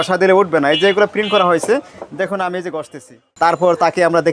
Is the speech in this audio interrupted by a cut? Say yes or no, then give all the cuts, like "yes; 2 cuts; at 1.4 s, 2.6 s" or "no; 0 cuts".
yes; 1 cut; at 3.2 s